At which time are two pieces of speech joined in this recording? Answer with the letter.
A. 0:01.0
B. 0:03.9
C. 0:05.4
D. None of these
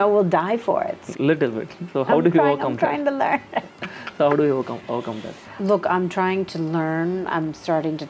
A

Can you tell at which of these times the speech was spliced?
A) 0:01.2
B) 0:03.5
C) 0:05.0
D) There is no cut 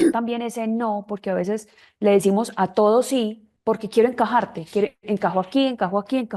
B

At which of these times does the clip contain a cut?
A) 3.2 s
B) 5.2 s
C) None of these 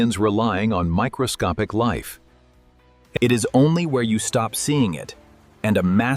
A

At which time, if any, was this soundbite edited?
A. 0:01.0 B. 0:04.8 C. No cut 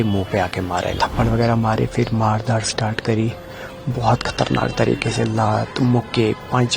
A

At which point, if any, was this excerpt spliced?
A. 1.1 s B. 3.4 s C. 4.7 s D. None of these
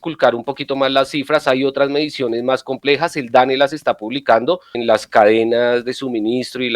C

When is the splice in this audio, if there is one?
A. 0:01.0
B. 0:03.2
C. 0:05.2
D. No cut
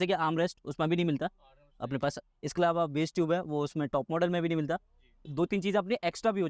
C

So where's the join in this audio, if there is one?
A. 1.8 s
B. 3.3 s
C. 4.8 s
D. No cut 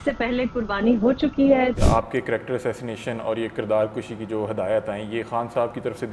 A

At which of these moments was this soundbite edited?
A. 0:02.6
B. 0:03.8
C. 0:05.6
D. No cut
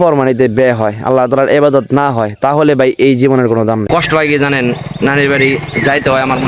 B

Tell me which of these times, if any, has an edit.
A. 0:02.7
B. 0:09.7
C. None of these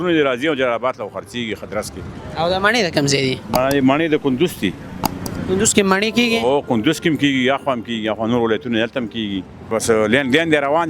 B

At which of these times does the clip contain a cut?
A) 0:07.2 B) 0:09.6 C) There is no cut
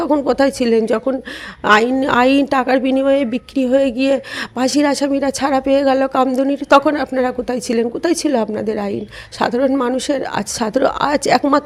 C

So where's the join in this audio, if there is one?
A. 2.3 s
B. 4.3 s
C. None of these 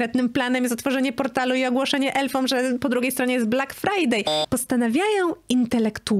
B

